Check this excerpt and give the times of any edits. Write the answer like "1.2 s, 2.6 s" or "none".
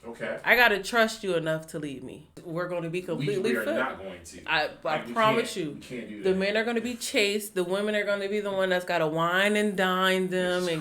2.4 s